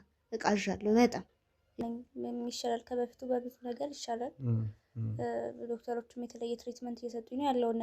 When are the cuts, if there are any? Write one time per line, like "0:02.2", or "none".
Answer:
0:01.8